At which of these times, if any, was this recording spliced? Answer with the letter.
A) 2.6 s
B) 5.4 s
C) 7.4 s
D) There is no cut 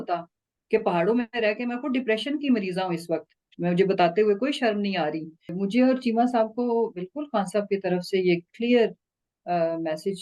B